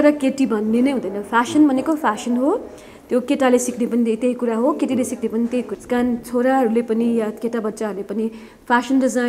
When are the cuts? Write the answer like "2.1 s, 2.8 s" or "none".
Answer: 5.8 s

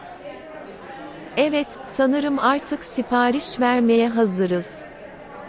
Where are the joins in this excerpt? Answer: 1.3 s, 4.6 s

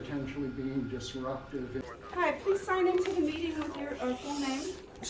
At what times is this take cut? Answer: 1.8 s

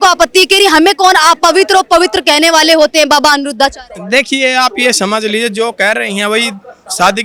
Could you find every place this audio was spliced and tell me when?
none

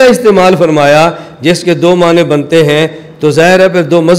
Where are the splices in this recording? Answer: none

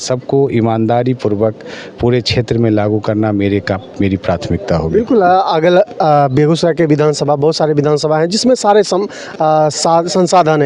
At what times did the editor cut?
none

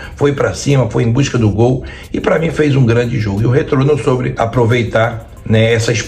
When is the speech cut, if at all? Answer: 4.3 s

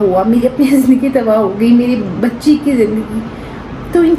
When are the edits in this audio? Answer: none

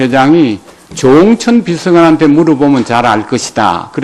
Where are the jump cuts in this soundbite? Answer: none

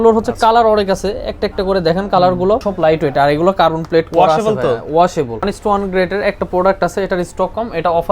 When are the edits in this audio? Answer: 2.7 s, 5.5 s

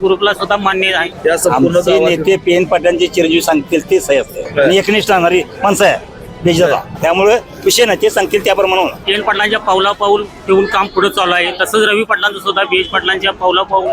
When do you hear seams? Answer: 1.1 s, 4.4 s, 6.9 s, 9.0 s

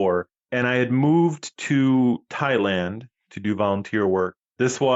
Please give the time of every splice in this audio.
none

